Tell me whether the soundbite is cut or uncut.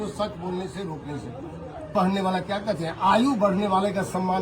cut